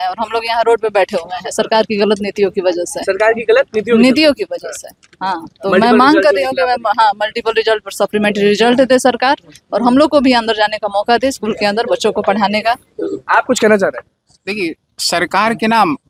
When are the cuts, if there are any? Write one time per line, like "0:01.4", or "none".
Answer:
none